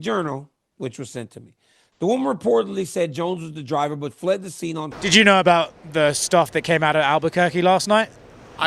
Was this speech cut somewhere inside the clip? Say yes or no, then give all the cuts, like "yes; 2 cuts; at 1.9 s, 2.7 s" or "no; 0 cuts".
yes; 1 cut; at 4.9 s